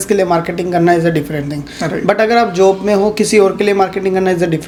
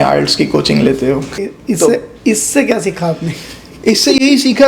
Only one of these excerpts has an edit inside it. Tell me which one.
second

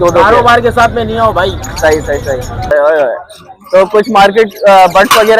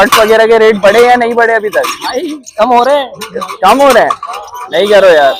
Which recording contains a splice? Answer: first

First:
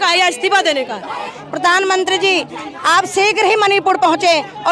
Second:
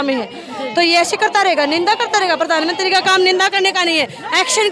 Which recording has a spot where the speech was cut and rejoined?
first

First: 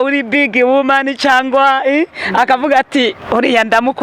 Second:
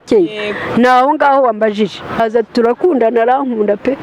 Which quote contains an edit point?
second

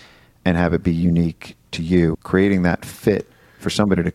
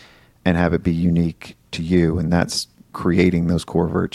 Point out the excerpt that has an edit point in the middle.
first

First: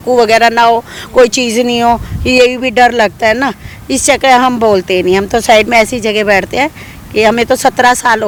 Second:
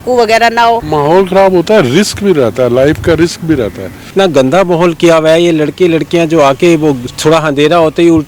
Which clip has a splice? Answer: second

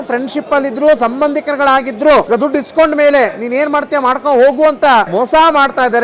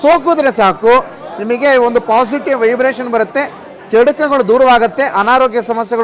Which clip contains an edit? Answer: first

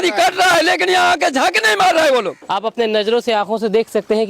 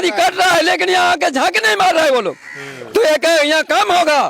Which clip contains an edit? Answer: first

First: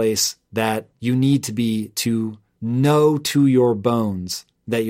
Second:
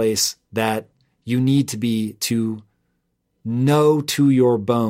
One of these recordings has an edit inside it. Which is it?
first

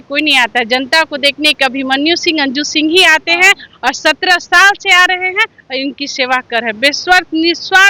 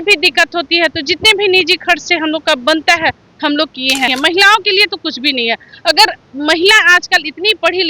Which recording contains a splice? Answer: second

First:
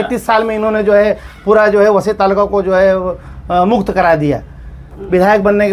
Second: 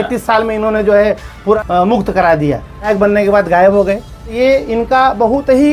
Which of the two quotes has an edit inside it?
second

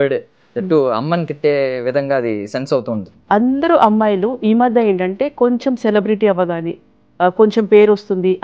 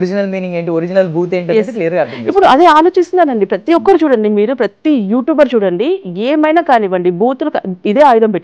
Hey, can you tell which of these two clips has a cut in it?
first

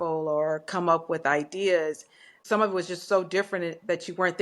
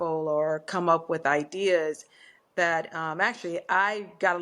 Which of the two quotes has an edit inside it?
first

